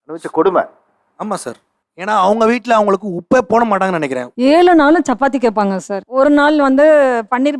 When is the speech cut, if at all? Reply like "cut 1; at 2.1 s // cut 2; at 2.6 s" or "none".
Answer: cut 1; at 4.2 s